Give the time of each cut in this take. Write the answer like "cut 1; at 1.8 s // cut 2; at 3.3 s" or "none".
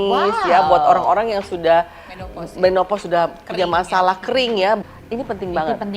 cut 1; at 4.8 s